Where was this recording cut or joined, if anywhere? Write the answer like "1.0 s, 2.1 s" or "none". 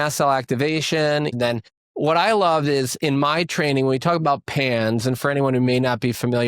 1.3 s